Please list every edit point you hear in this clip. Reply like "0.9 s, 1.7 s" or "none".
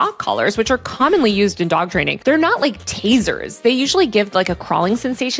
none